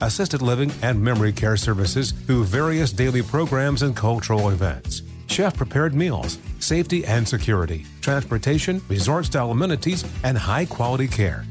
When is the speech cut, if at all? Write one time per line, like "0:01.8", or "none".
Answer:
none